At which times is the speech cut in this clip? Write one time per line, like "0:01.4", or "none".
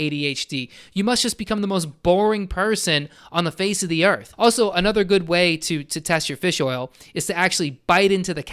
0:04.3